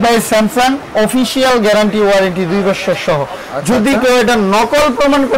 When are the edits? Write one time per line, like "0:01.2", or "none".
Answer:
none